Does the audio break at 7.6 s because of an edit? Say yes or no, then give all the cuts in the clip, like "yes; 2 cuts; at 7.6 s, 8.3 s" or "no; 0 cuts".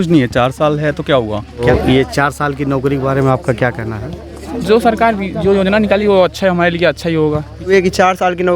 yes; 2 cuts; at 1.6 s, 7.6 s